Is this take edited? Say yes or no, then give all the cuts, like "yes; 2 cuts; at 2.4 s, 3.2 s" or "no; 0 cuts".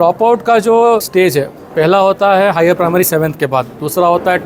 yes; 1 cut; at 1.1 s